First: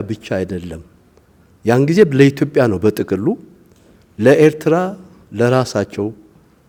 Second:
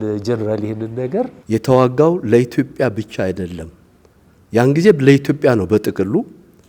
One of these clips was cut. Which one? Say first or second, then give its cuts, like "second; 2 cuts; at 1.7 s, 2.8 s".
second; 1 cut; at 1.4 s